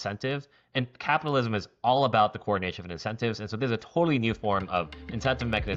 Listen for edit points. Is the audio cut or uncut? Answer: uncut